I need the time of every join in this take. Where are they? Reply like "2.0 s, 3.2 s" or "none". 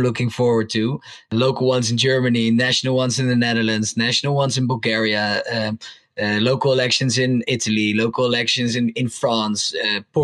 1.3 s